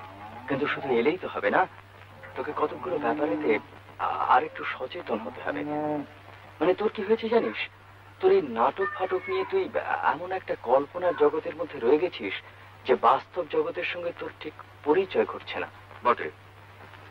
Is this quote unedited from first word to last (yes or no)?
yes